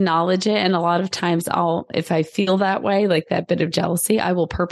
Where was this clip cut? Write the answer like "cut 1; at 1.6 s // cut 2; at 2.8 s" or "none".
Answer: none